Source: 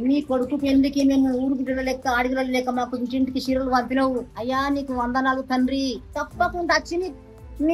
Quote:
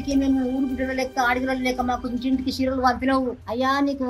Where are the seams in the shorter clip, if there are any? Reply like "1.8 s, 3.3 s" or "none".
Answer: none